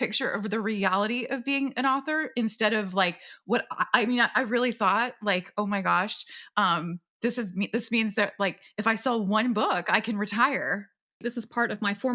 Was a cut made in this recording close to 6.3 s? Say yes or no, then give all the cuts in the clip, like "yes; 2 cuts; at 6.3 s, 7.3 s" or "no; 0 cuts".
no; 1 cut; at 11.2 s